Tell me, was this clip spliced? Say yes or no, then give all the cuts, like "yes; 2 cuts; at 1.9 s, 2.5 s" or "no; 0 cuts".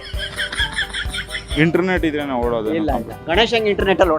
yes; 1 cut; at 1.5 s